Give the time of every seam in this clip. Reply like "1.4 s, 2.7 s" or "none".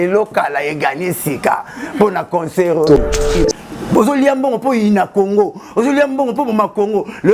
3.4 s